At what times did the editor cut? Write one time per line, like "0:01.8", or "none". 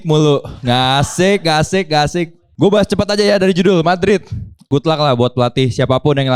0:02.4
0:04.7